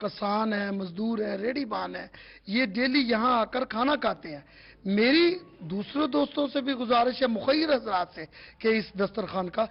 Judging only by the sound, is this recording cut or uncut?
uncut